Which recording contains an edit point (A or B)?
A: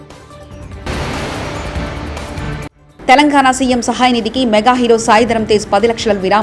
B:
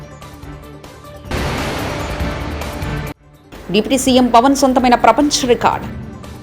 B